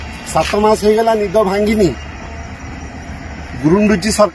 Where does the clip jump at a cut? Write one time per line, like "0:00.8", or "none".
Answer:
none